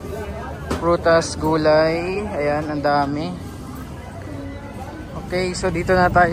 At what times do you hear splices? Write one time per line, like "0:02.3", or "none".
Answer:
0:05.3